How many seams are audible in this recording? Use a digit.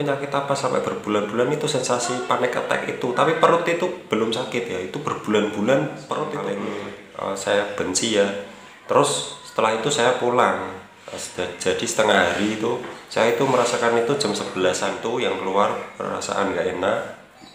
2